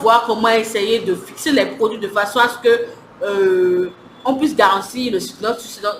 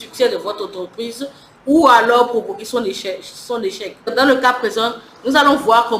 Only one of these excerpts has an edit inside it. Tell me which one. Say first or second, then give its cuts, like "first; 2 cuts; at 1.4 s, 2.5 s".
second; 1 cut; at 4.1 s